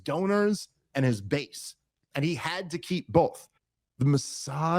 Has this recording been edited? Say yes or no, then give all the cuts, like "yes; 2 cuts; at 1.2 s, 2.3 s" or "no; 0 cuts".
yes; 1 cut; at 3.5 s